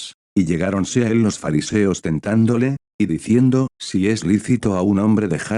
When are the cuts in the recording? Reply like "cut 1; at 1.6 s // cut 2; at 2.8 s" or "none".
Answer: cut 1; at 3.8 s